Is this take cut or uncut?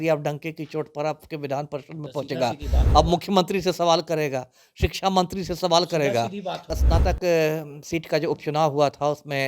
cut